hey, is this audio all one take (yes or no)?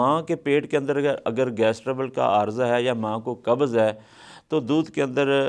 yes